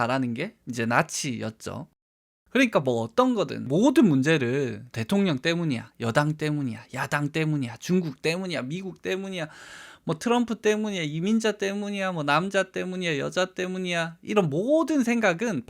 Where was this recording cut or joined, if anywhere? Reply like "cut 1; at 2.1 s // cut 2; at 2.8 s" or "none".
cut 1; at 4.9 s